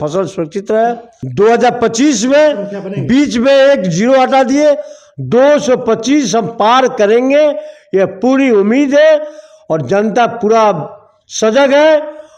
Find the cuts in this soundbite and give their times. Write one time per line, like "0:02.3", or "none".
0:01.1